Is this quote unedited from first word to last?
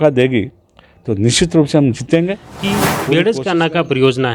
no; 1 cut; at 2.7 s

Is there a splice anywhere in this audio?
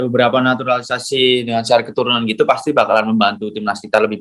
no; 0 cuts

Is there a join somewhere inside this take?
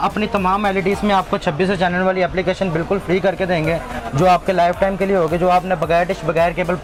no; 0 cuts

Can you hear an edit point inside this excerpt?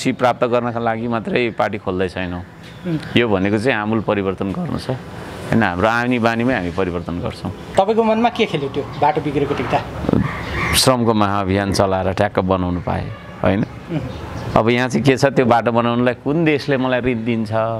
yes; 1 cut; at 7.5 s

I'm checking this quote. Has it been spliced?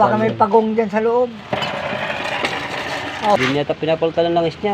yes; 1 cut; at 3.4 s

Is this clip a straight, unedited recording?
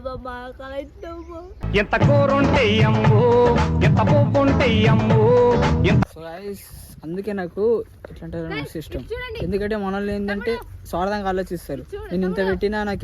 no; 1 cut; at 6.1 s

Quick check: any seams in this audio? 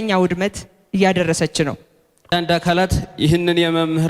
yes; 1 cut; at 2.3 s

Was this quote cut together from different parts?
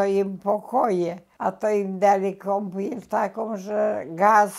yes; 1 cut; at 1.2 s

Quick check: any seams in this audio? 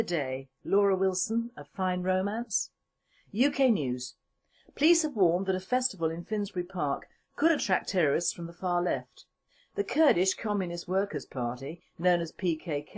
yes; 1 cut; at 3.7 s

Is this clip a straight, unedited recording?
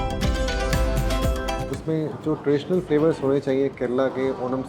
no; 1 cut; at 1.7 s

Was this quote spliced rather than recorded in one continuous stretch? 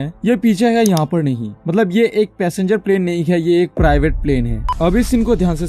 yes; 1 cut; at 4.6 s

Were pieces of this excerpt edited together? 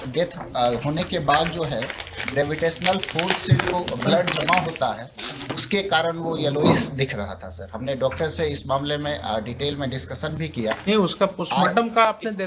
no; 0 cuts

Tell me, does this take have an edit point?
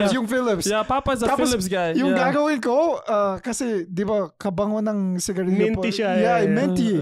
no; 0 cuts

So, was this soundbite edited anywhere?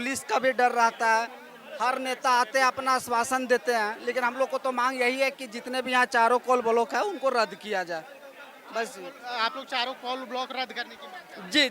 no; 0 cuts

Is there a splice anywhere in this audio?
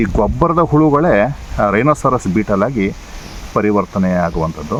no; 0 cuts

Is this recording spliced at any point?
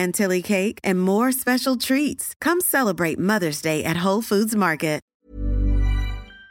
yes; 1 cut; at 5.0 s

